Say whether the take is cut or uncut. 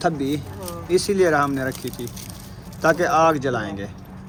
uncut